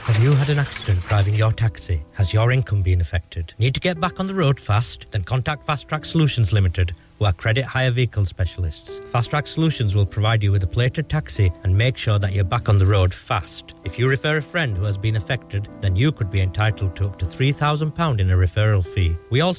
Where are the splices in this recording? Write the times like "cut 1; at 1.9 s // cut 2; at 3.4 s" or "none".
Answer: none

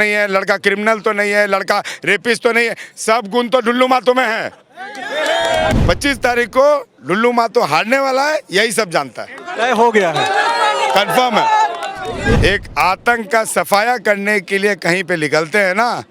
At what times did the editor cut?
cut 1; at 5.7 s // cut 2; at 12.4 s

